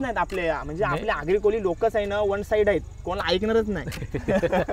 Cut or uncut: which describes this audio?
uncut